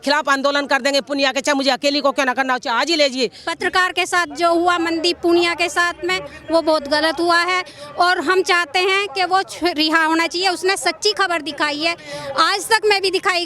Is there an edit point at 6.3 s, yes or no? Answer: no